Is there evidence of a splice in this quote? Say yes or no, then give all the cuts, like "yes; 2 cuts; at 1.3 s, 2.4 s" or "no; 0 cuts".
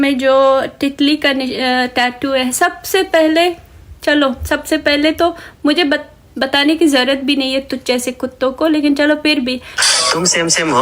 yes; 1 cut; at 9.7 s